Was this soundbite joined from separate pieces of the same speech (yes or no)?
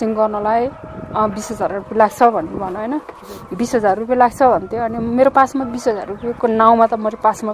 no